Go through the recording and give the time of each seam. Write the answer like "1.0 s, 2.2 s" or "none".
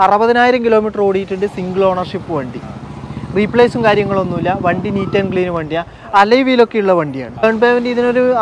7.3 s